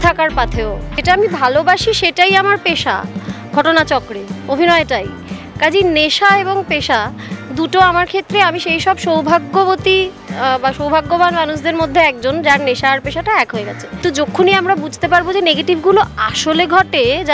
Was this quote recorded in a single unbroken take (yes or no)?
no